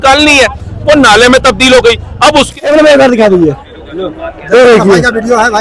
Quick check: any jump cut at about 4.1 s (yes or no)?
no